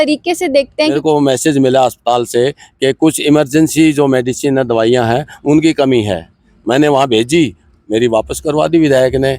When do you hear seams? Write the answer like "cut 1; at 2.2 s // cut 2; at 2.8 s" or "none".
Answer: cut 1; at 0.9 s